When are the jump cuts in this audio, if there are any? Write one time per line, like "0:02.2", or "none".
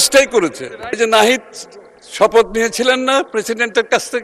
0:01.0